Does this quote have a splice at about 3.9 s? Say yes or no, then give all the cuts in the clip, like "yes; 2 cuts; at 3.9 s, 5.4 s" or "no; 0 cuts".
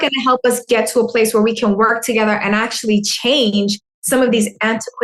no; 0 cuts